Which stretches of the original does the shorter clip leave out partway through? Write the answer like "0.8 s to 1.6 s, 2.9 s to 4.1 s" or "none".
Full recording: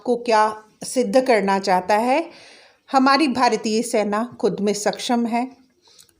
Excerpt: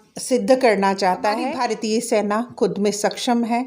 2.2 s to 3.3 s